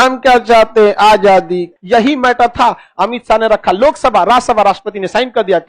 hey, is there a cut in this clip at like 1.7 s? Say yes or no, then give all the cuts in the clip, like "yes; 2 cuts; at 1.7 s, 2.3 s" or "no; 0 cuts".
yes; 1 cut; at 1.7 s